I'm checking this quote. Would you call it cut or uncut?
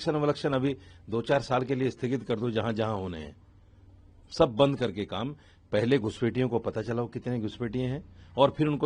uncut